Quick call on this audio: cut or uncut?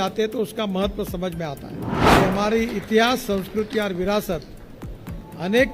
cut